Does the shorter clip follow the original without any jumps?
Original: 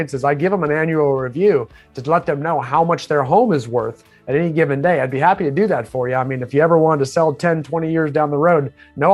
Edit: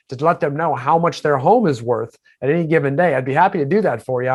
yes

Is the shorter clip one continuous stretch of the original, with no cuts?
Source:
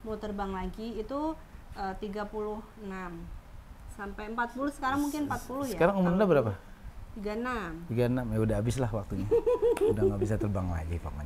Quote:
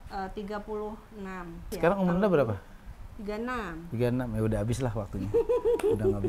no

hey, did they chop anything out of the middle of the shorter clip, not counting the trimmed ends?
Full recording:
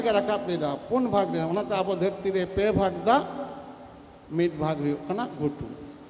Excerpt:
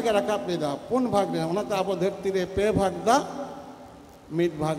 no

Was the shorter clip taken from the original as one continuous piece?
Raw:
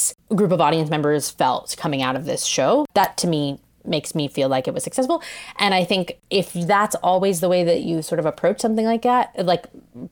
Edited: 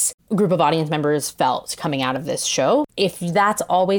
no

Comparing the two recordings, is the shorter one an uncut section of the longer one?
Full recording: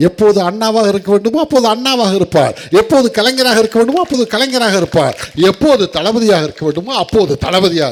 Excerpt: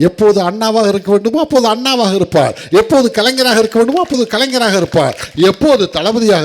yes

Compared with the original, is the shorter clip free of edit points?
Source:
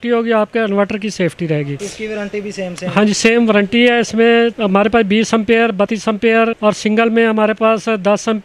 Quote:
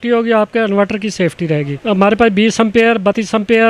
no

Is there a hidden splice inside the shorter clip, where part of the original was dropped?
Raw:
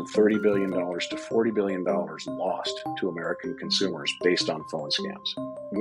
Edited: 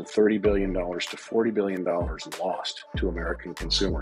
no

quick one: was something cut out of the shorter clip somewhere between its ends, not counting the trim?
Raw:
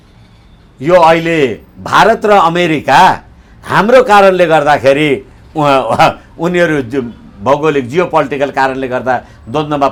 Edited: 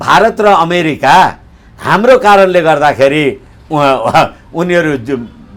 no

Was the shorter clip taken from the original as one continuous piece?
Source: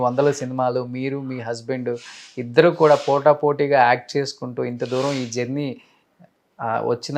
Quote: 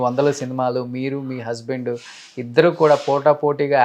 yes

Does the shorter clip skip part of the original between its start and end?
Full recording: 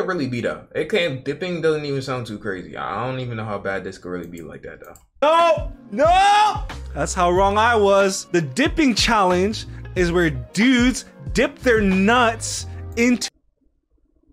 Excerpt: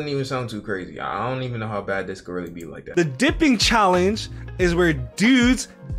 yes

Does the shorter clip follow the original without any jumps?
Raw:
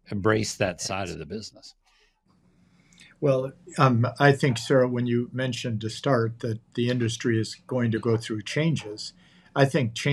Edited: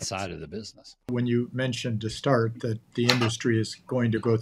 no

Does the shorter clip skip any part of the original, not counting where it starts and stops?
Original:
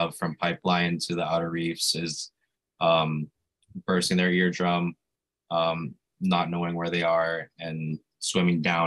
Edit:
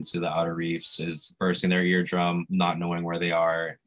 yes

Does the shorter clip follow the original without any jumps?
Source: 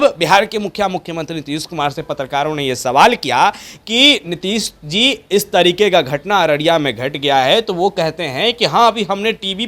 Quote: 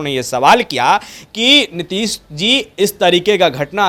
yes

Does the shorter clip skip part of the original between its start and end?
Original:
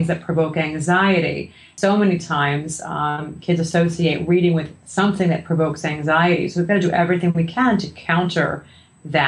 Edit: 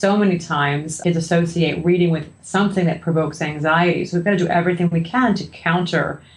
yes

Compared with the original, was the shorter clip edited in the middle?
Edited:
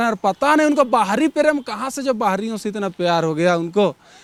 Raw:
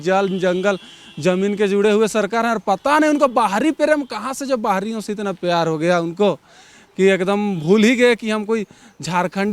no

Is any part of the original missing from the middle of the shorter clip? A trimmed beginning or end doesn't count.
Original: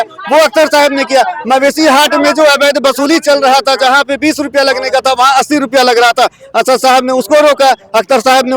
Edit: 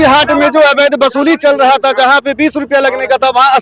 no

